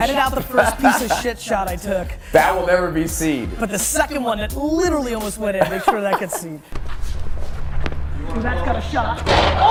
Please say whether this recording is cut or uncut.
uncut